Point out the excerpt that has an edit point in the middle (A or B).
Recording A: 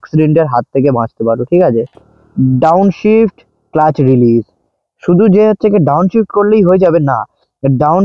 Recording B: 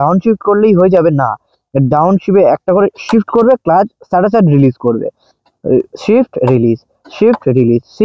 A